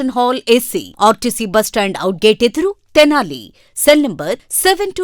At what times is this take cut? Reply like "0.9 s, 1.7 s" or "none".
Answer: none